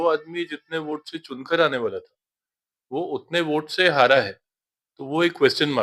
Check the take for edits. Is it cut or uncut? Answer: uncut